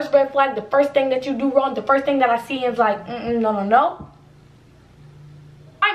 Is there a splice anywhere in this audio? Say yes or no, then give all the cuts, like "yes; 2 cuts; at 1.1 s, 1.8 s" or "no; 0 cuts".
no; 0 cuts